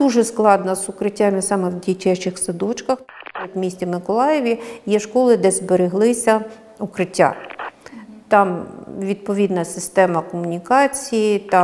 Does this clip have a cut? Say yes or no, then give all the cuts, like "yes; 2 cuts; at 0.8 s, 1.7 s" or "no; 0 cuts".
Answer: yes; 1 cut; at 3.4 s